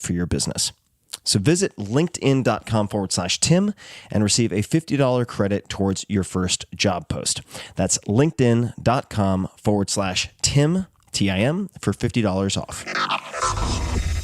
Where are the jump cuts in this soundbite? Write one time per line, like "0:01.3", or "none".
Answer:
0:12.9